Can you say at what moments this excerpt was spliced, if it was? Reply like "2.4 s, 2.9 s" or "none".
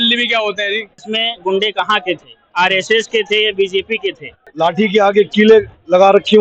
1.0 s, 4.4 s